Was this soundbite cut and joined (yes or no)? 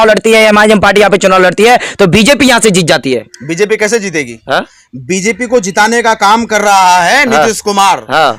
no